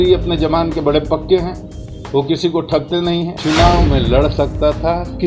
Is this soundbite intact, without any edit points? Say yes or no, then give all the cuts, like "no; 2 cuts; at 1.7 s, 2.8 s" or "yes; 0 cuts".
no; 1 cut; at 3.3 s